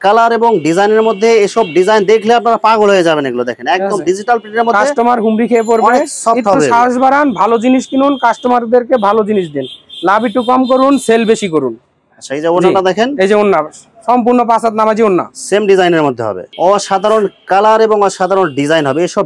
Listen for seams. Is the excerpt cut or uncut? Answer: uncut